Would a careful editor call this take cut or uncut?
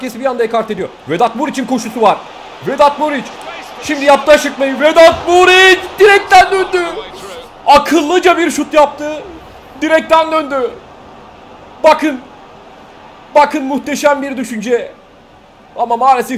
uncut